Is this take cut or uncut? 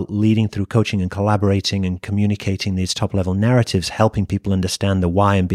uncut